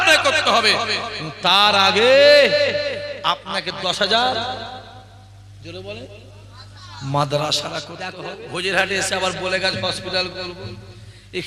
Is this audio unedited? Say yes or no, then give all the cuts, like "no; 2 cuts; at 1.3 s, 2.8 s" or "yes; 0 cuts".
no; 1 cut; at 8.0 s